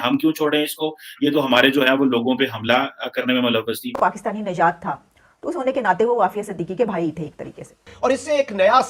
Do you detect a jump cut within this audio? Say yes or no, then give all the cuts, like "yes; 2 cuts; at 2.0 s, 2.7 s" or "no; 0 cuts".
yes; 2 cuts; at 4.0 s, 7.8 s